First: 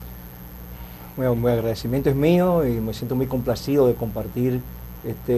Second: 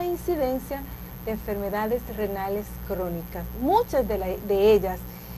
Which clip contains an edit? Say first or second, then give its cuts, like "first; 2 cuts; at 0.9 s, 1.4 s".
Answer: second; 1 cut; at 3.4 s